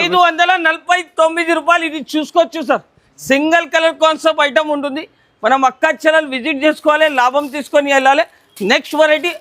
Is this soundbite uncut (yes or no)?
yes